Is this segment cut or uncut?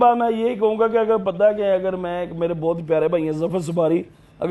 uncut